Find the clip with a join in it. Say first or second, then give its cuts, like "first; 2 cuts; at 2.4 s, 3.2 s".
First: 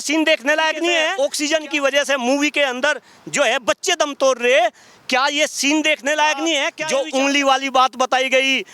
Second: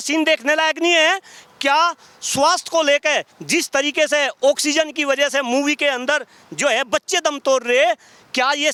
first; 2 cuts; at 1.1 s, 6.8 s